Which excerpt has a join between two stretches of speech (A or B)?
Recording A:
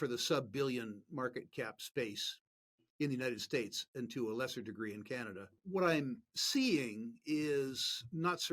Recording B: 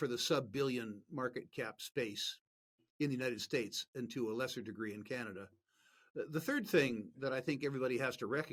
A